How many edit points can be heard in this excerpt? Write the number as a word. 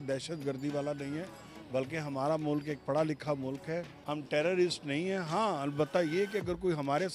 one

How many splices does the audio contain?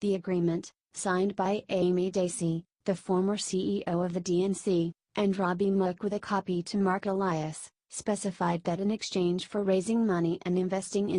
zero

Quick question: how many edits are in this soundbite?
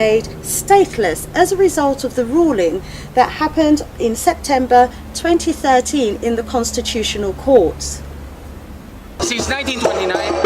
one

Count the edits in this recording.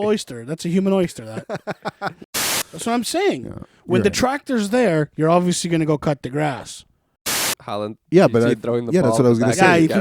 two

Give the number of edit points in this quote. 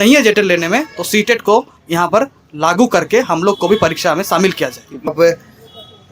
one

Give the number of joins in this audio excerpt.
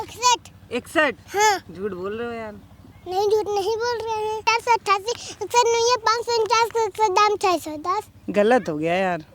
one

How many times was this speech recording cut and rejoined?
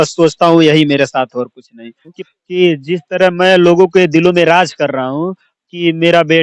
one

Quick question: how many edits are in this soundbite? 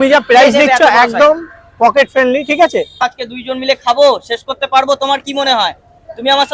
one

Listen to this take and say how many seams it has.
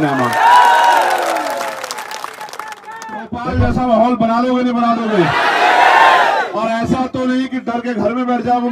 one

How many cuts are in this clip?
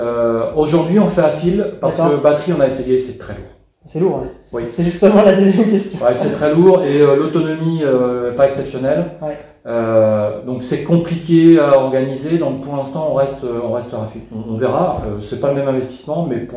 zero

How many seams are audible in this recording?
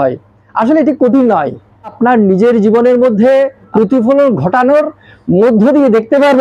two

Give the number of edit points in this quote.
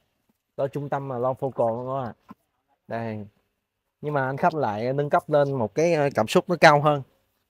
zero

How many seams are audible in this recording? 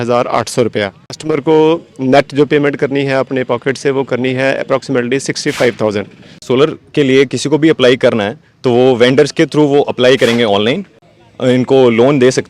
three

